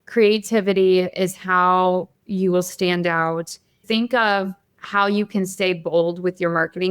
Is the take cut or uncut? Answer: cut